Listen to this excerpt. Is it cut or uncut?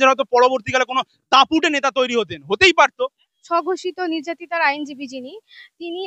cut